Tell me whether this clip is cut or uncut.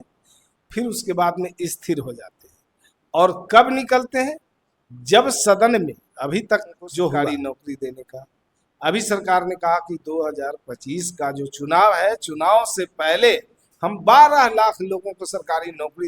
cut